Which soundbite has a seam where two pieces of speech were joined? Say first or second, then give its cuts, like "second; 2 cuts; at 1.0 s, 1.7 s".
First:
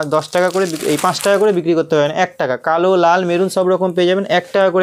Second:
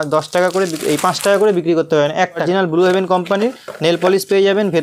second; 1 cut; at 2.4 s